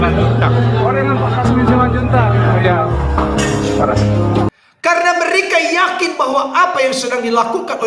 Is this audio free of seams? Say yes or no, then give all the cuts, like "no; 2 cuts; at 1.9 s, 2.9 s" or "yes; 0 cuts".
no; 1 cut; at 4.5 s